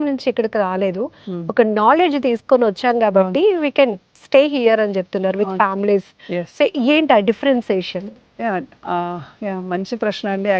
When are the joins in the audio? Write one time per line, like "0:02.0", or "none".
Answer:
none